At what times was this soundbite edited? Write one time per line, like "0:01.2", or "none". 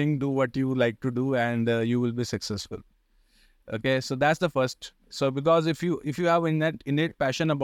none